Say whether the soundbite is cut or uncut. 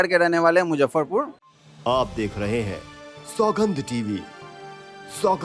cut